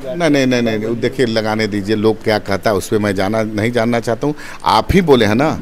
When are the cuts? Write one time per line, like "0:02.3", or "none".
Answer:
none